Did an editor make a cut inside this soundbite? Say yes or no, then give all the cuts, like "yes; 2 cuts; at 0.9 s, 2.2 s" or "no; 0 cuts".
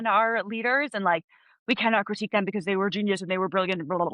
no; 0 cuts